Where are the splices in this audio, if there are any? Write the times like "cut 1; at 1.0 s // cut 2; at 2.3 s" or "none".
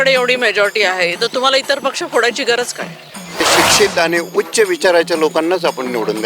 cut 1; at 3.5 s